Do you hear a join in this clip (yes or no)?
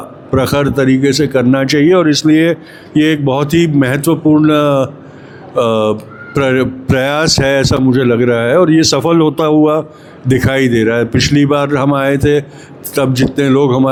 no